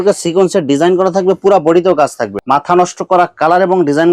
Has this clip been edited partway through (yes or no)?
yes